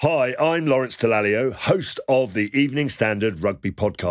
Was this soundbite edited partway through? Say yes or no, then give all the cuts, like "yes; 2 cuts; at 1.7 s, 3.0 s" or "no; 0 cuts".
no; 0 cuts